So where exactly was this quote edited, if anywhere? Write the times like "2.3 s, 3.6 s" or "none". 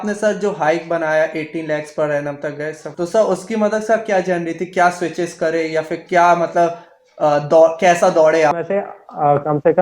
8.6 s